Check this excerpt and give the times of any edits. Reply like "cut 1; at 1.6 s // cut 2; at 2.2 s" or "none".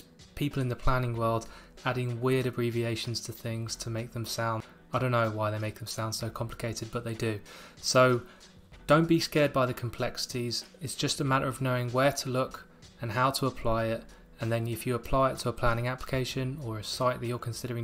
none